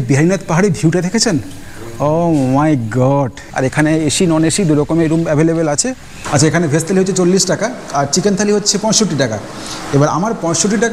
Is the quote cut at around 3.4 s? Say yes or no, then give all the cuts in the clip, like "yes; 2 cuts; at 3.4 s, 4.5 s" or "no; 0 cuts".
yes; 2 cuts; at 3.4 s, 6.2 s